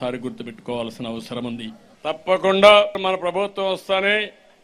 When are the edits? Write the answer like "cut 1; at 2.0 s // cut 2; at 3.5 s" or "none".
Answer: cut 1; at 1.8 s // cut 2; at 3.0 s